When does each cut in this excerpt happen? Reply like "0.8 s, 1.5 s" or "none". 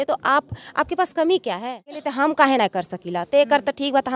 2.1 s